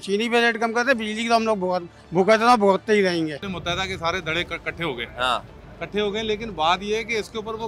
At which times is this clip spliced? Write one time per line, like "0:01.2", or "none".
0:03.4